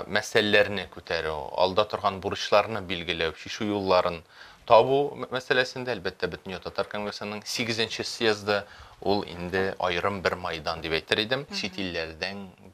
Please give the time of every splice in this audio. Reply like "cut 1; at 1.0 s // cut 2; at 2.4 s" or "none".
cut 1; at 11.6 s

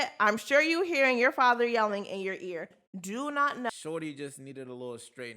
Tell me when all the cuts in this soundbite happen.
cut 1; at 3.7 s

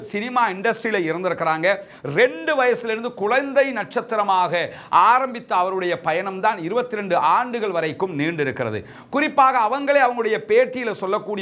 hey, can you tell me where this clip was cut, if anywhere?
none

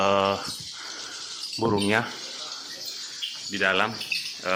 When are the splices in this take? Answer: none

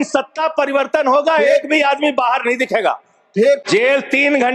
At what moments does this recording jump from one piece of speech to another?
cut 1; at 3.7 s

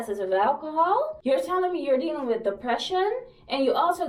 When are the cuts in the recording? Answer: cut 1; at 1.2 s

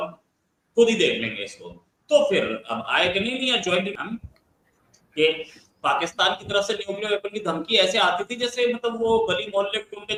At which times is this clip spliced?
none

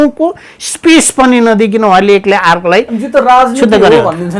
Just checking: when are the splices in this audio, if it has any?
none

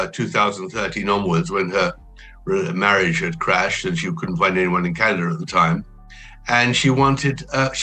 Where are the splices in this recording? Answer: none

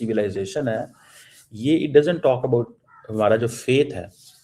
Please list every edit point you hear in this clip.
none

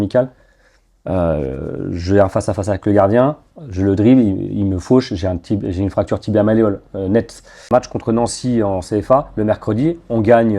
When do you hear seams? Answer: cut 1; at 7.7 s

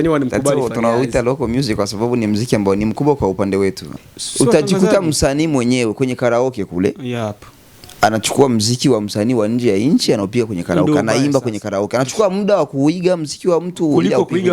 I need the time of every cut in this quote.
cut 1; at 3.9 s

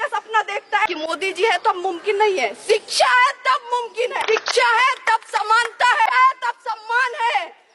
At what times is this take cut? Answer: cut 1; at 0.9 s // cut 2; at 4.2 s // cut 3; at 6.1 s

